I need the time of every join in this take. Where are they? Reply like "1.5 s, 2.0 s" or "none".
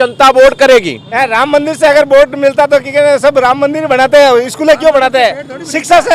none